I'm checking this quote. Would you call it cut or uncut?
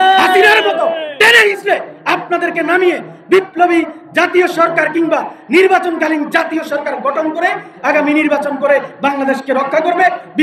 uncut